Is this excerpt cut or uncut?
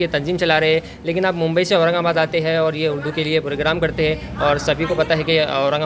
uncut